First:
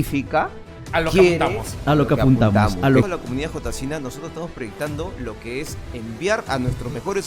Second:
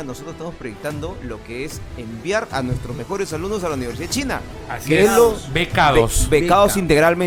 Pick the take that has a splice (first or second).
first